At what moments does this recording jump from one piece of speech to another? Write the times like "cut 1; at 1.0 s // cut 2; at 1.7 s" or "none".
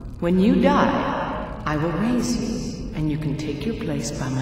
none